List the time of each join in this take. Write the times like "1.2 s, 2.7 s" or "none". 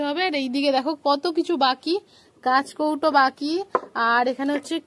none

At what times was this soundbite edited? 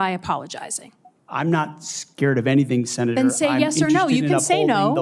none

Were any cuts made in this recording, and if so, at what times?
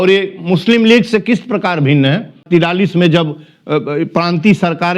2.4 s

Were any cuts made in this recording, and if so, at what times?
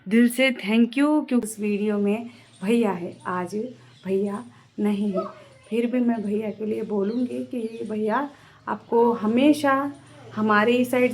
1.5 s

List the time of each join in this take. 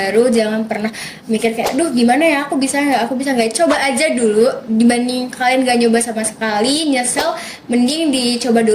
none

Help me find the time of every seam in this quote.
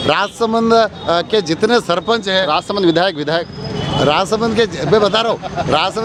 none

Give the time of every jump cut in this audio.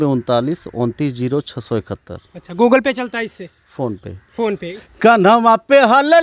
4.6 s

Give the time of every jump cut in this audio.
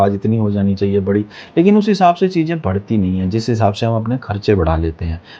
none

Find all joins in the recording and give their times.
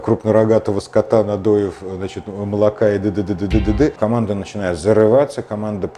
3.9 s

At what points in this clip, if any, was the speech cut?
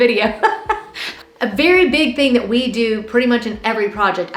1.1 s

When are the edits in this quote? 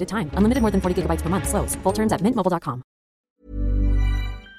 3.3 s

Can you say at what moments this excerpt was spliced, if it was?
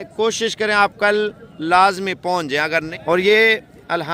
2.9 s

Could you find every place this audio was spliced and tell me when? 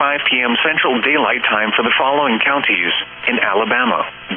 1.1 s

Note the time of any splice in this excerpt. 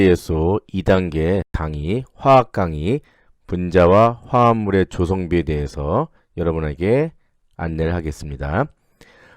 1.6 s

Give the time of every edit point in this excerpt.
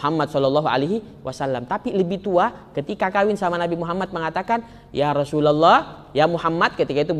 none

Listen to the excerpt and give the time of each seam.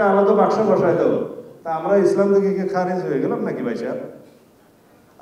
none

